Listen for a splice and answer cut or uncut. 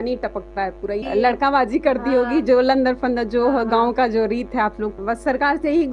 cut